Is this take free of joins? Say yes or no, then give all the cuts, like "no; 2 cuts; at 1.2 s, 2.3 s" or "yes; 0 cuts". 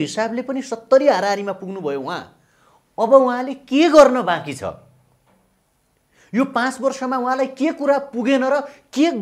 yes; 0 cuts